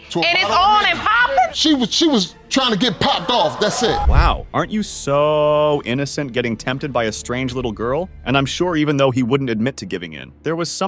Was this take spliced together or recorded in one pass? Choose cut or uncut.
uncut